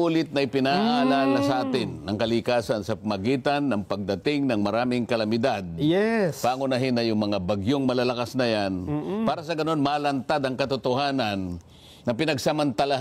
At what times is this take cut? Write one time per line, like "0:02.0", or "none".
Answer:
none